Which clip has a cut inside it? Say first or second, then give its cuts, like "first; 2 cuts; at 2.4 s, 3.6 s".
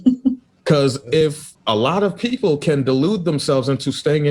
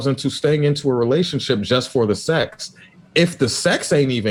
first; 1 cut; at 1.5 s